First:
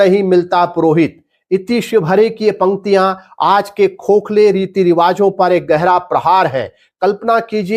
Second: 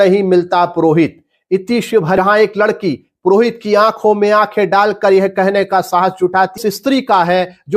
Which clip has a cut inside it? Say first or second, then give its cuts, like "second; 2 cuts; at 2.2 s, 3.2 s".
second; 2 cuts; at 2.2 s, 6.6 s